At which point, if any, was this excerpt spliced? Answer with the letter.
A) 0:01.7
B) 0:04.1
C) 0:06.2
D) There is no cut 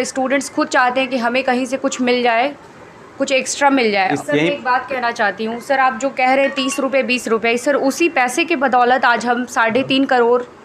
B